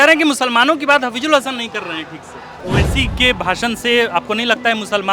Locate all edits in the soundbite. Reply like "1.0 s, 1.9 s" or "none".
2.6 s